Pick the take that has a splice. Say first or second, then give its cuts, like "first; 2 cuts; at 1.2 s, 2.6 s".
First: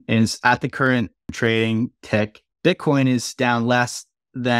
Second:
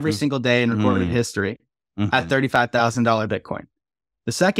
first; 2 cuts; at 1.3 s, 2.4 s